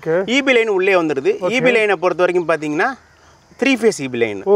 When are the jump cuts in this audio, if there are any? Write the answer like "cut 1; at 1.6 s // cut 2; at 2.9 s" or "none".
none